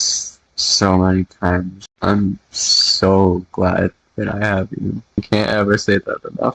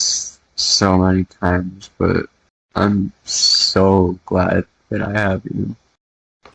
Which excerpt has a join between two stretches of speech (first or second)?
first